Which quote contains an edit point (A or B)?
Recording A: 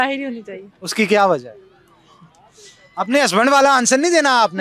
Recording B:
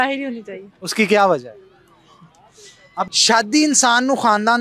B